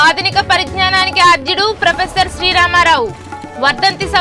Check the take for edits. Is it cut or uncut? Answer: uncut